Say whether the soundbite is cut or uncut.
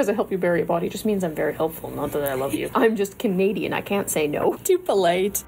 cut